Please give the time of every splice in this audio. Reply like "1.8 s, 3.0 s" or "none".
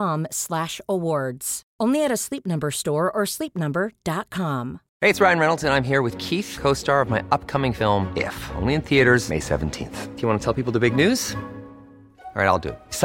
4.8 s